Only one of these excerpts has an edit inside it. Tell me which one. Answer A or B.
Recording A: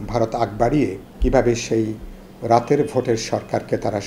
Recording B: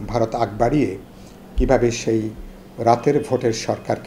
A